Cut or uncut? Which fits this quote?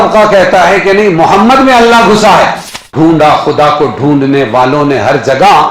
cut